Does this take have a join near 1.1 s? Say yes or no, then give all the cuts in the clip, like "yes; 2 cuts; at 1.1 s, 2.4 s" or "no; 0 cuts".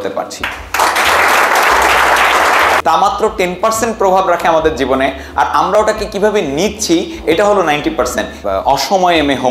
no; 2 cuts; at 2.8 s, 8.3 s